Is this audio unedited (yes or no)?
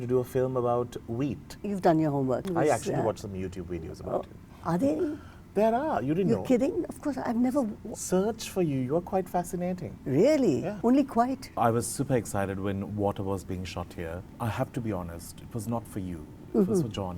no